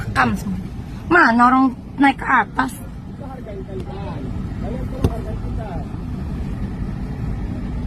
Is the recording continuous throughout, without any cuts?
yes; 0 cuts

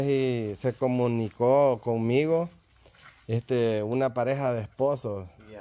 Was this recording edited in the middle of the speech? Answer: no; 0 cuts

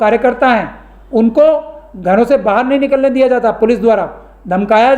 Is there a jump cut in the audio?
no; 0 cuts

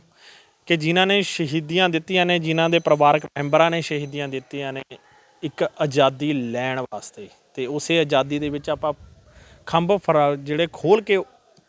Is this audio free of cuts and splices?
yes; 0 cuts

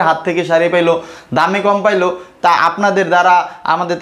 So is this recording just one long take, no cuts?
yes; 0 cuts

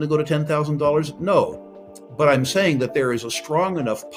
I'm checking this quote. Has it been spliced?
no; 0 cuts

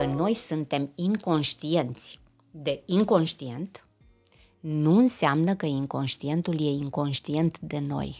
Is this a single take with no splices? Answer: yes; 0 cuts

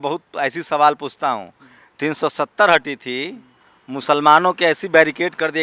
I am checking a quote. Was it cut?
no; 0 cuts

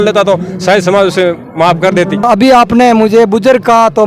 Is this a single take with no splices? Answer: no; 1 cut; at 2.2 s

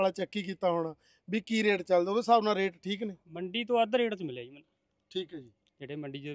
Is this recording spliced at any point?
no; 0 cuts

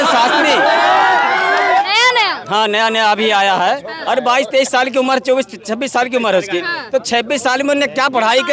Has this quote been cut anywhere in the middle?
yes; 1 cut; at 1.8 s

